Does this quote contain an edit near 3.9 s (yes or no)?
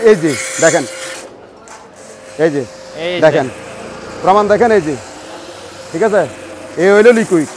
no